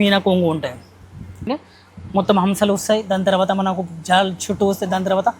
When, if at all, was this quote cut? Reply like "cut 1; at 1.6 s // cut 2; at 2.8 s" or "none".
cut 1; at 1.5 s